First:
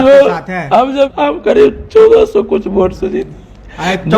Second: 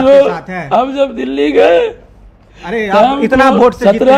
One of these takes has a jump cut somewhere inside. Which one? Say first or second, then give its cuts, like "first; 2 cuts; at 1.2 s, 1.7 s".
first; 1 cut; at 1.1 s